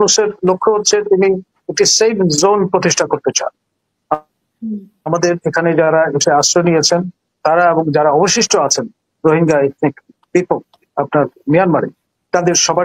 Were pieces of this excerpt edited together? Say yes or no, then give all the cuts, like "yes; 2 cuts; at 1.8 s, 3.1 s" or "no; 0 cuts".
no; 0 cuts